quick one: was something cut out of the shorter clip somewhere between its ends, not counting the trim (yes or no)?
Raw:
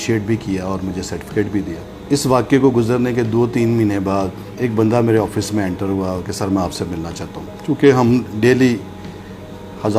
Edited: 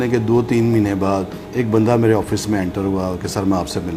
no